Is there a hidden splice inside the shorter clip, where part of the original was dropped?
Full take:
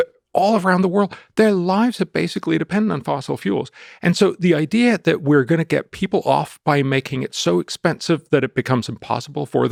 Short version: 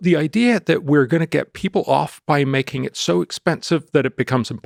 no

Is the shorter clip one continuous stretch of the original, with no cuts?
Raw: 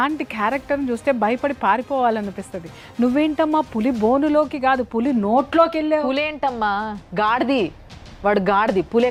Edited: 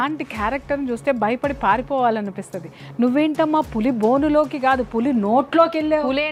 yes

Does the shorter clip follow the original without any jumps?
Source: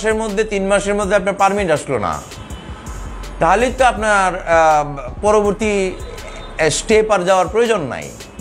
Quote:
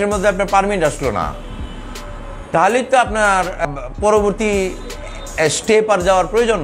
no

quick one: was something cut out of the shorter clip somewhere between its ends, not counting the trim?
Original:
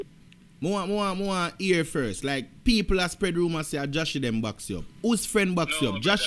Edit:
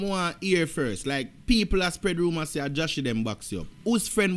no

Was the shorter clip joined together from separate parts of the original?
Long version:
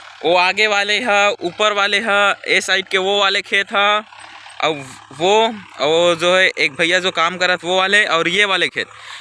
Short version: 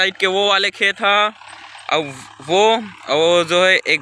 no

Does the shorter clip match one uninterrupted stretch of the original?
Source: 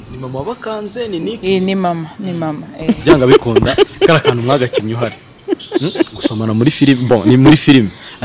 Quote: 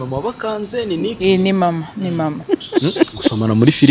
no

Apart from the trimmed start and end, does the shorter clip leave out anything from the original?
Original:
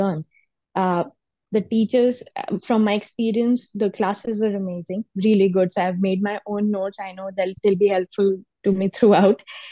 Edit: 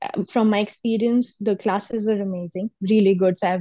no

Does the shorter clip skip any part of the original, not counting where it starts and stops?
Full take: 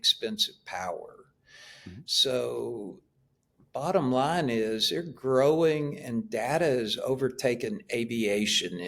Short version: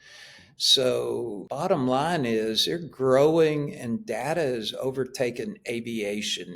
yes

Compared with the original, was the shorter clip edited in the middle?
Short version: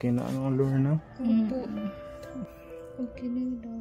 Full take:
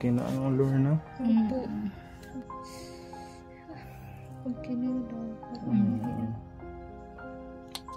yes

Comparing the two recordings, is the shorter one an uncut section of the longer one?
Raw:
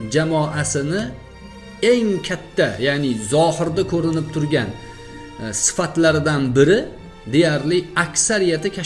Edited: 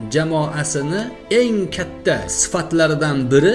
no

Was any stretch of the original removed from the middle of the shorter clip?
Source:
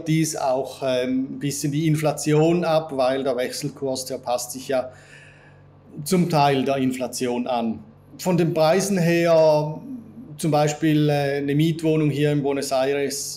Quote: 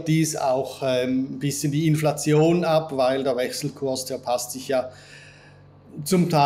no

